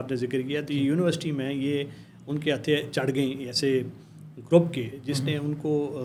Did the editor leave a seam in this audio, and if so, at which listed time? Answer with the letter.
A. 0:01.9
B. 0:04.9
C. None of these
C